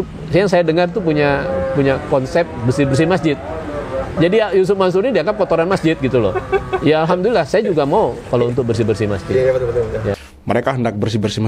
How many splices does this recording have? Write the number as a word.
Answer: one